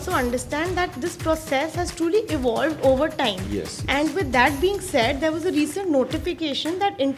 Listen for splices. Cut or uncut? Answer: uncut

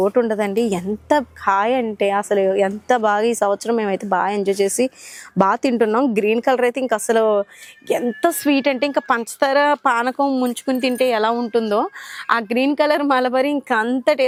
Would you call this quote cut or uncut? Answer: uncut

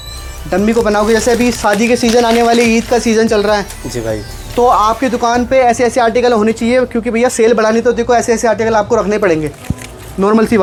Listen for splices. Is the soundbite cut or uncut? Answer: uncut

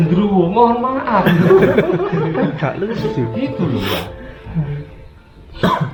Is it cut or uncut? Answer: uncut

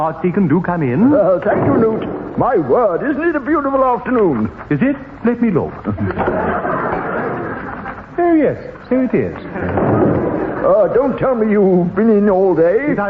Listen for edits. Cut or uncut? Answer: cut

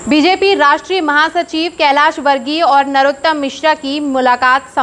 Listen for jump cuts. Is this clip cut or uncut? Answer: uncut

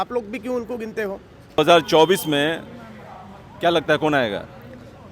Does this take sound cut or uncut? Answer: cut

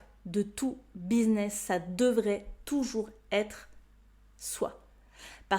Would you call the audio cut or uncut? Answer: uncut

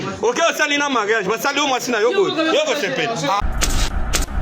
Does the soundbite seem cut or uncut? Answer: cut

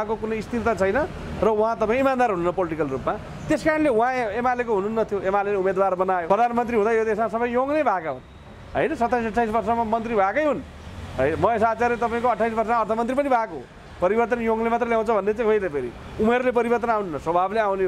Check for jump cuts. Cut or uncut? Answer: cut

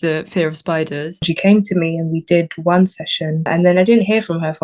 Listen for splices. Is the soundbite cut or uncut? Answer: cut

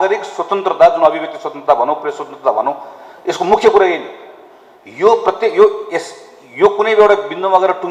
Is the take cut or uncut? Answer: uncut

